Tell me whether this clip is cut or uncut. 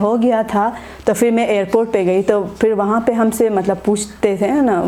uncut